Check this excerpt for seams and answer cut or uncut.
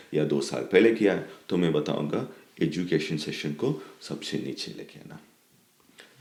uncut